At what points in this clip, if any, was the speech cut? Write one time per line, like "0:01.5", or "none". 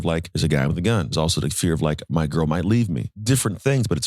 0:01.1
0:03.1